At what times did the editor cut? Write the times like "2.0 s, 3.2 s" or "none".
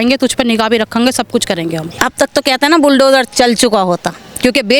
1.9 s